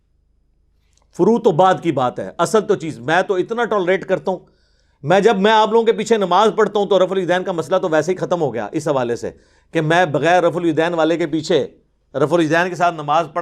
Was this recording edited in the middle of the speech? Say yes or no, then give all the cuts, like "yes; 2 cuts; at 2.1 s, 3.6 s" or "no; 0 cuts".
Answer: no; 0 cuts